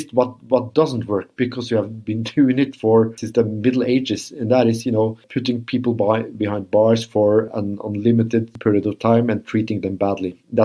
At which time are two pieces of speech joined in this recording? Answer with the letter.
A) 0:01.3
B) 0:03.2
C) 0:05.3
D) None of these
C